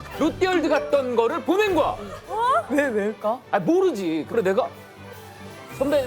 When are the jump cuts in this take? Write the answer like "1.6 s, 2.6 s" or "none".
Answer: 4.3 s